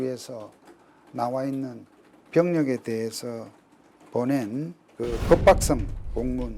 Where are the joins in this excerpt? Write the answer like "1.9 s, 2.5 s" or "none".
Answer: 4.8 s